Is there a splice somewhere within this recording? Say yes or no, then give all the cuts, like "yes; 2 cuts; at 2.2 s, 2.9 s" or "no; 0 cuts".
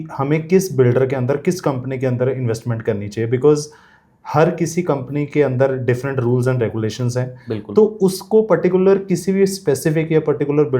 no; 0 cuts